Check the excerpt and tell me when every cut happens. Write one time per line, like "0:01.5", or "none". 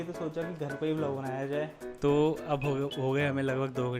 0:01.8

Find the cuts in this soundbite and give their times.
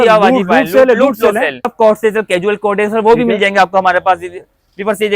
0:01.7

